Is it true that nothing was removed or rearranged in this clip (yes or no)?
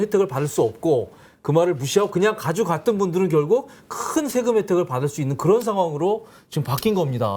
yes